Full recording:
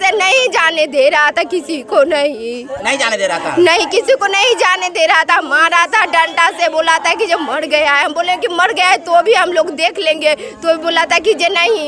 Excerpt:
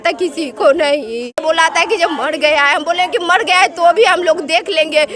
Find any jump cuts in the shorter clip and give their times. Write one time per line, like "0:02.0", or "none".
0:01.4